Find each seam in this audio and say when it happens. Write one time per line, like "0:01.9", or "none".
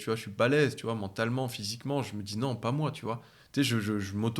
none